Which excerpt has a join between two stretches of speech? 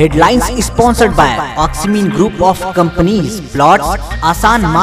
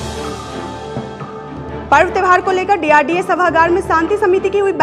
second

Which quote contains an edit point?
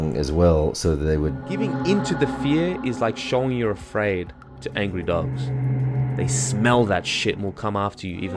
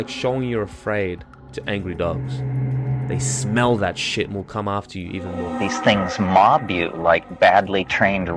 first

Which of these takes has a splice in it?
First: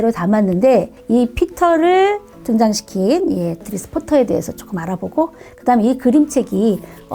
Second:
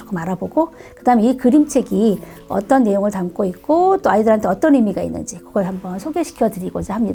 first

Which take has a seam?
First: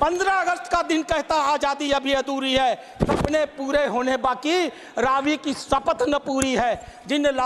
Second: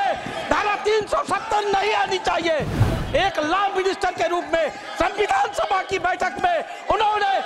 second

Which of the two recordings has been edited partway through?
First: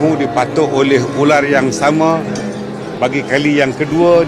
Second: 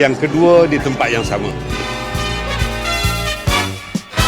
second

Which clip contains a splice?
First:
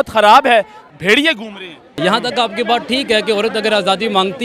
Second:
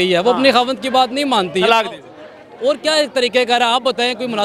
first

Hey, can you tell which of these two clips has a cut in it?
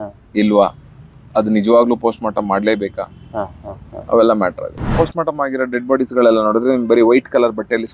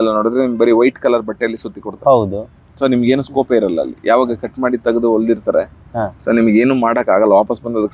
first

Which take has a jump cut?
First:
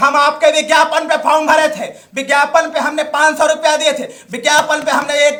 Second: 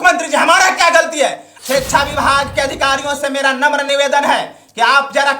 second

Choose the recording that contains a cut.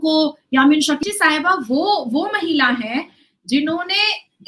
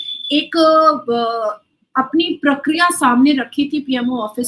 first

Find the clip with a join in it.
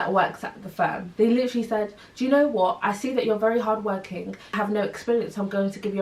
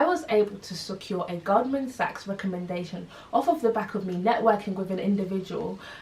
first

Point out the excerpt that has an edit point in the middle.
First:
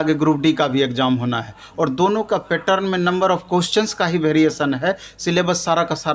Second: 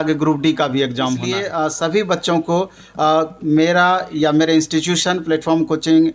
second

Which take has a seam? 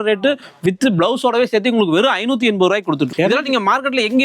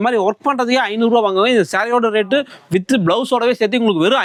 first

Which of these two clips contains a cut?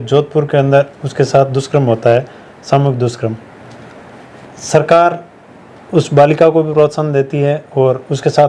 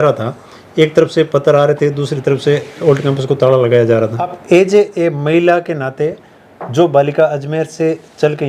second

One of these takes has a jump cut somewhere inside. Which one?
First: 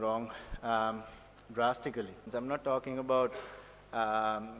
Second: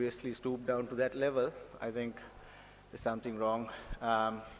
first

